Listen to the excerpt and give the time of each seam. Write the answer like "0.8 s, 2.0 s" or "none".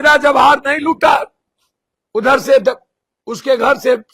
none